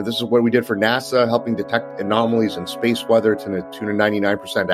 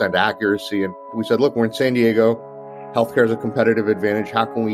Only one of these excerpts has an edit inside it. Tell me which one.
second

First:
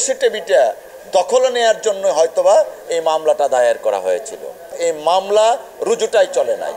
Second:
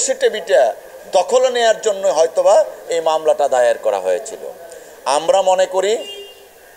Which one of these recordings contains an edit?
first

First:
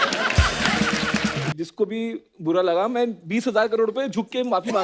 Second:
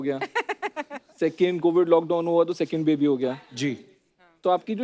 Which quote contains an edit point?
first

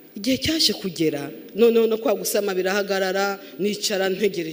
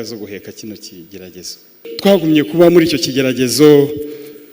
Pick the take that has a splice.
second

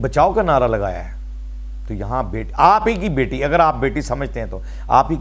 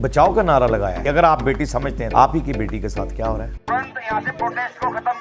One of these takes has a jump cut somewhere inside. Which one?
second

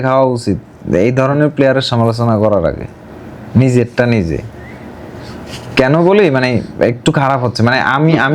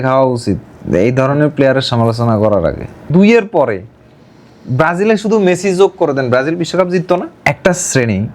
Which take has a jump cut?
second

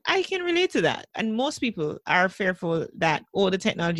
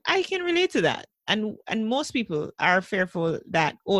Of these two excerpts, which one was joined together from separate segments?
first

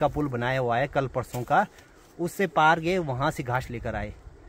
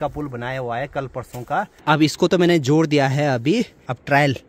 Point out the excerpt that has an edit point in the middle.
second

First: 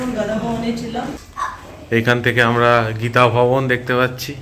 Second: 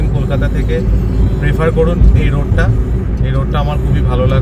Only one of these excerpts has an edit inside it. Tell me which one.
first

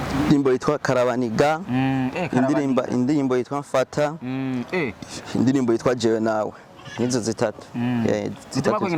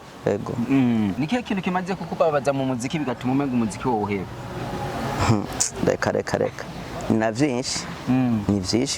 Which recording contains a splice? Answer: second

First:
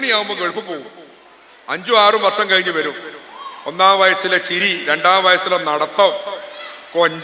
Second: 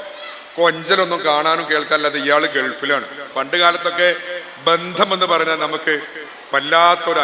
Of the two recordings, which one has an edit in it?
second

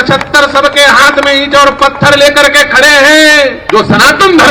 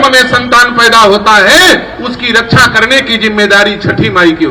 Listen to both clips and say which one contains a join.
first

